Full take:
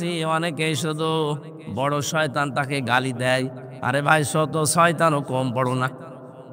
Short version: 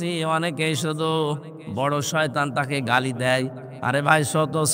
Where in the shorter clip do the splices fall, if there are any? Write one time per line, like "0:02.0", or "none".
none